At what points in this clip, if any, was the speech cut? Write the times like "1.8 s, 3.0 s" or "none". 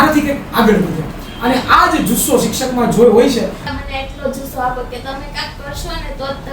3.7 s